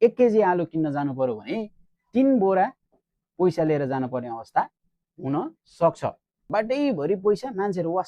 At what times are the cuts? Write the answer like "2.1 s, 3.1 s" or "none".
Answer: 6.3 s